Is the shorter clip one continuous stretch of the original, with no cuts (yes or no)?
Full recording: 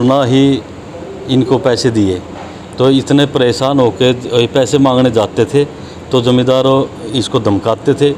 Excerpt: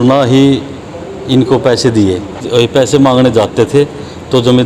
no